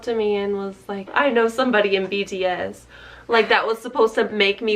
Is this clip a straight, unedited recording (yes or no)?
no